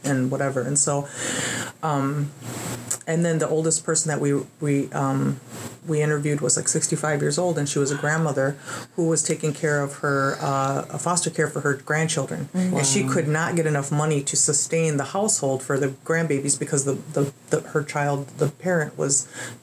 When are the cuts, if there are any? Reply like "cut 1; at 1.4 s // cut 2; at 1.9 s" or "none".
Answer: none